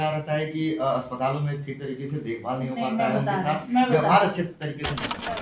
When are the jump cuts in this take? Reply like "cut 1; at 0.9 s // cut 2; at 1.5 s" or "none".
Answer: none